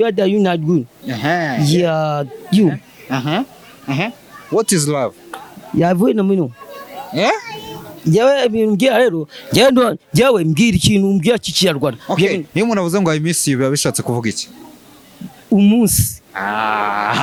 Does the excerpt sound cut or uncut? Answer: uncut